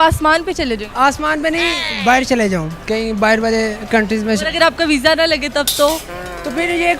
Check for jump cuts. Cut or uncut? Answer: uncut